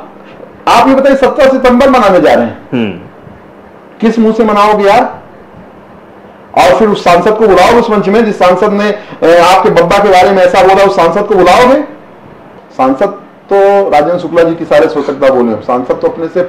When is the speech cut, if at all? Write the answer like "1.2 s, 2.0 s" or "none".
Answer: 12.6 s